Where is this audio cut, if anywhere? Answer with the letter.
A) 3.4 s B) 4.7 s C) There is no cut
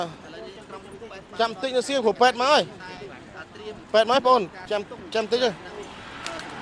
C